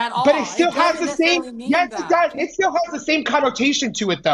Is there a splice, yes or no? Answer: no